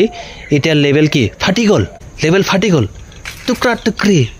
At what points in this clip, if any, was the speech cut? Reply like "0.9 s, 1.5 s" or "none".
2.0 s